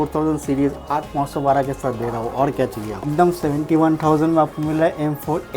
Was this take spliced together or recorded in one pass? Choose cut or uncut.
cut